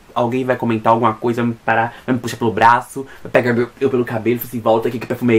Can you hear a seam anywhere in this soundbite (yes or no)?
no